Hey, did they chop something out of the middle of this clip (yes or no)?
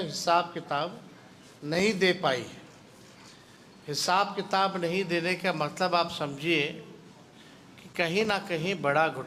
no